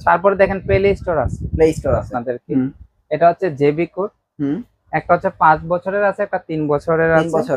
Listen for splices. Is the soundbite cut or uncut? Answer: cut